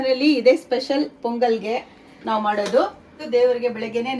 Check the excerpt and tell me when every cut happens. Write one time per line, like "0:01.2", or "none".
0:03.1